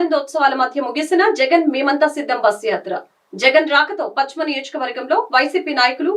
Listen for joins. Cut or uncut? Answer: uncut